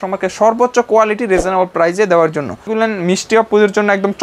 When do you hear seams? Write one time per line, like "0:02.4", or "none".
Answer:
0:02.7